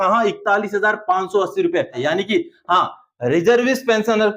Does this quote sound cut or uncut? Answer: cut